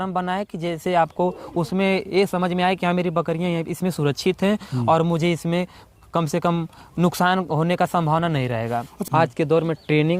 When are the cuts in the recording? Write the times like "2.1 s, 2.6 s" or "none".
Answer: 9.0 s